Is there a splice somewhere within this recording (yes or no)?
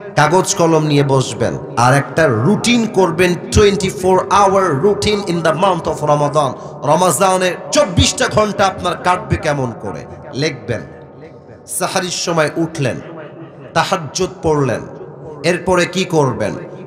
yes